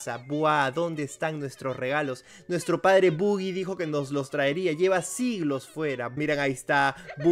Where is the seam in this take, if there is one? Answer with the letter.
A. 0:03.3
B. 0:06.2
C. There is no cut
B